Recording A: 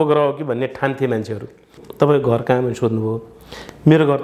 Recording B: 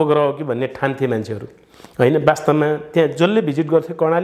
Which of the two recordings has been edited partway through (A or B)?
A